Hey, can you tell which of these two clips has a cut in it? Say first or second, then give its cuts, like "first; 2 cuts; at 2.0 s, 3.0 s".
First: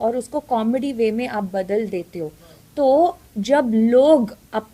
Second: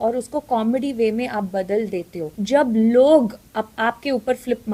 second; 1 cut; at 2.3 s